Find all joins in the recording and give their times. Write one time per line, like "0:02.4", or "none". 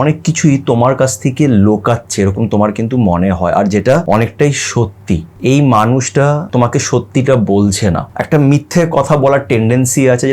0:04.0
0:05.3
0:06.4
0:08.1